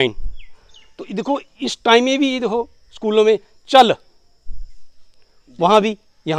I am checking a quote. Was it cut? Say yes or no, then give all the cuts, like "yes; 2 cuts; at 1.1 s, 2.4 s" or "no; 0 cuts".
no; 0 cuts